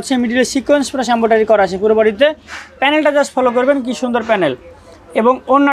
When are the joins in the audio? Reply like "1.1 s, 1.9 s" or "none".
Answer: none